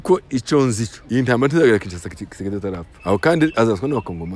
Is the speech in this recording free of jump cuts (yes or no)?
no